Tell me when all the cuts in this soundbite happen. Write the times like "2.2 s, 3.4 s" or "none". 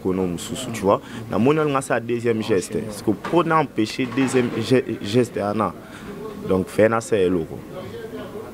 none